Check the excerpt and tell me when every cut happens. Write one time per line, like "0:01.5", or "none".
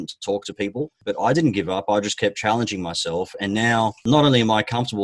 0:01.0
0:04.0

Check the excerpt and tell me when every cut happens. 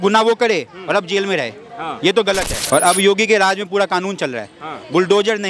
0:02.6

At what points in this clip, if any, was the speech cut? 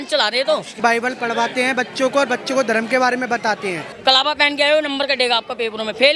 0:00.8
0:03.9

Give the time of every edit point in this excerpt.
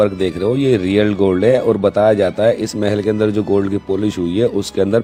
none

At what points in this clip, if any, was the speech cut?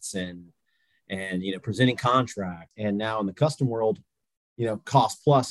0:02.6

